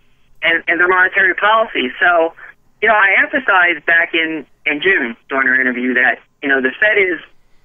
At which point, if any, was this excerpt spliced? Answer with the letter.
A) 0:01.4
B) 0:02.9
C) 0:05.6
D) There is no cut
C